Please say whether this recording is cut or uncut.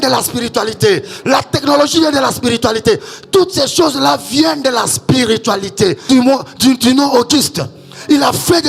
cut